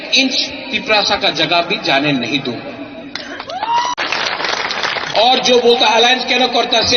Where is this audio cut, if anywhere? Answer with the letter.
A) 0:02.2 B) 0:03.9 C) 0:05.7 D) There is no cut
B